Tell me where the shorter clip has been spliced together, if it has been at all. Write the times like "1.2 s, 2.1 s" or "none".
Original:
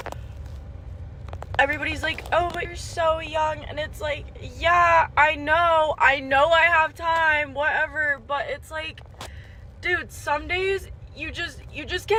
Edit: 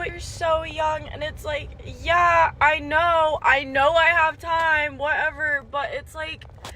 none